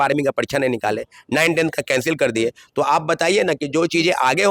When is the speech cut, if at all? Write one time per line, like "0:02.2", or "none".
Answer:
none